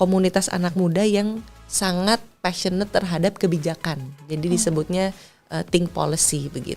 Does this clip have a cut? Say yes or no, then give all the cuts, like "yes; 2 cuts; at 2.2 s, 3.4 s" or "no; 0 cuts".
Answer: no; 0 cuts